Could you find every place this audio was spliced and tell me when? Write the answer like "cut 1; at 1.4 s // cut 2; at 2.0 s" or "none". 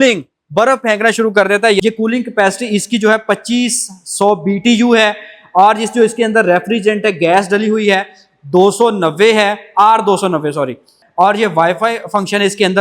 cut 1; at 1.8 s // cut 2; at 11.0 s